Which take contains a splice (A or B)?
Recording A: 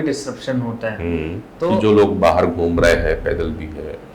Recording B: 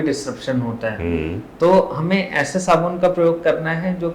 A